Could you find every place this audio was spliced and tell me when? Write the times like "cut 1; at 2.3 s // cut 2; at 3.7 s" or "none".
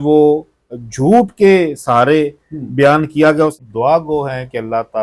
cut 1; at 3.5 s